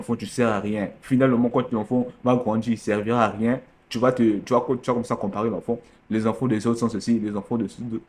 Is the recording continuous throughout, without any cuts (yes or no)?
yes